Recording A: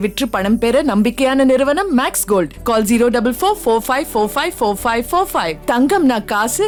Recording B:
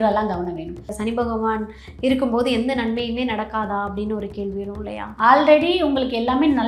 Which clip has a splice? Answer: B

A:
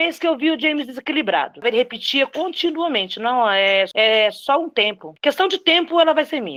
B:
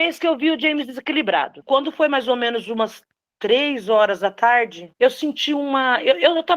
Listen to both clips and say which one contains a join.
B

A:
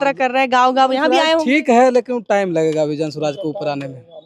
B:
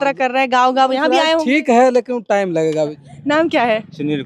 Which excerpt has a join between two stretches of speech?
B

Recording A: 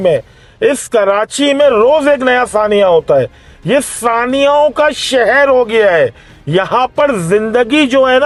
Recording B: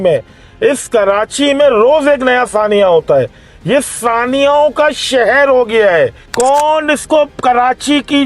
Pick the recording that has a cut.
B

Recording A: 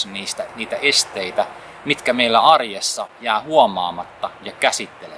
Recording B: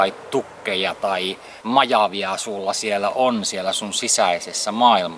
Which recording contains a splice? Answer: B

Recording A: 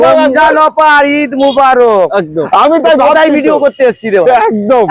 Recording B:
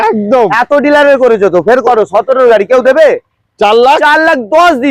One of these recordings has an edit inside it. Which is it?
A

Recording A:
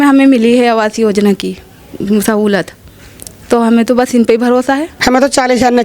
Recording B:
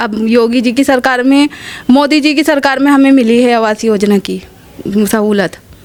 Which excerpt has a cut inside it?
A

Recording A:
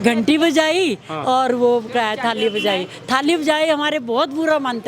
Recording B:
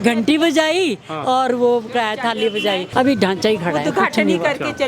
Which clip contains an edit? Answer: B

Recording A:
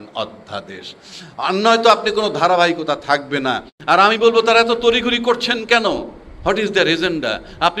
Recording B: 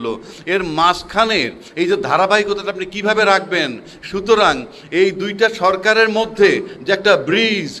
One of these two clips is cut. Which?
A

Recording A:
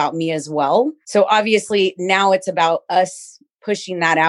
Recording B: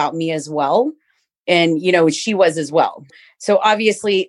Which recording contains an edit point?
A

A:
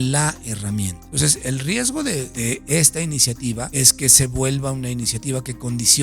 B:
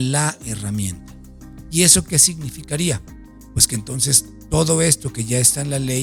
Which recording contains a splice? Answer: A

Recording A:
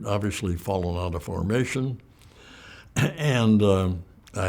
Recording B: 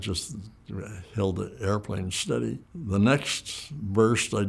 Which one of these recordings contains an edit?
B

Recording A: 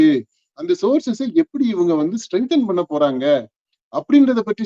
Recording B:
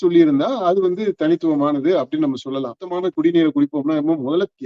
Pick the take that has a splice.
B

